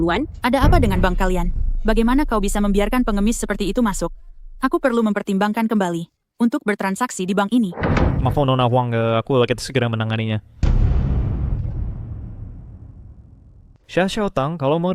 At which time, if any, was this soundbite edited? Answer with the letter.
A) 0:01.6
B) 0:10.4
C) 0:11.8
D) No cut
D